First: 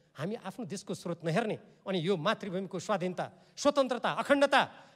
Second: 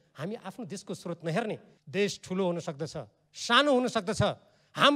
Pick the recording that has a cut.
second; 1 cut; at 1.7 s

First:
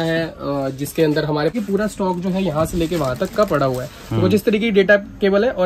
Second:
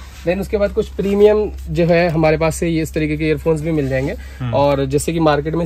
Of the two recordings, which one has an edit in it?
first; 1 cut; at 1.5 s

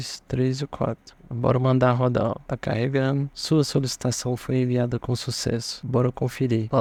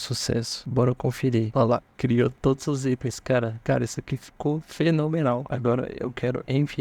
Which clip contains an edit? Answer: second; 1 cut; at 5.5 s

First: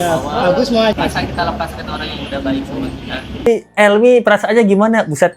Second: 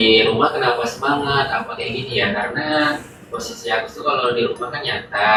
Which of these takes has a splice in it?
first; 2 cuts; at 1.0 s, 3.5 s

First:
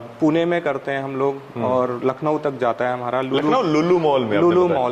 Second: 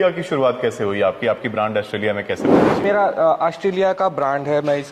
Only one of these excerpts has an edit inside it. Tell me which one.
second; 1 cut; at 2.8 s

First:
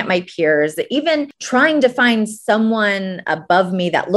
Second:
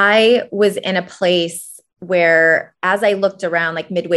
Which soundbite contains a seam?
first; 1 cut; at 1.4 s

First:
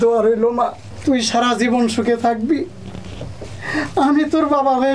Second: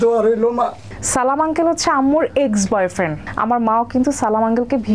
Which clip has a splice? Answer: second; 2 cuts; at 0.9 s, 3.2 s

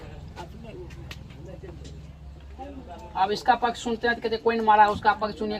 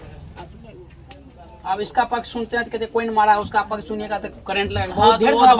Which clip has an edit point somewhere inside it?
second; 1 cut; at 1.3 s

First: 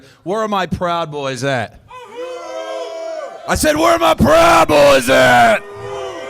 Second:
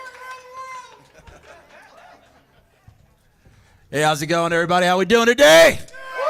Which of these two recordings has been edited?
first; 1 cut; at 3.3 s

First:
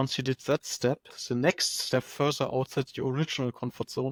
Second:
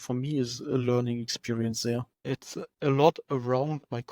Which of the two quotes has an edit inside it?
second; 1 cut; at 2.1 s

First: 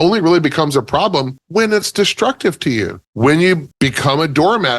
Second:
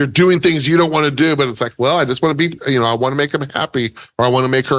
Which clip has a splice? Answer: first; 3 cuts; at 1.4 s, 3.0 s, 3.7 s

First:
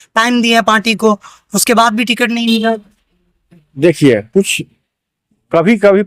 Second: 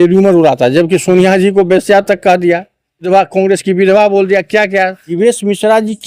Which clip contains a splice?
second; 2 cuts; at 3.1 s, 5.1 s

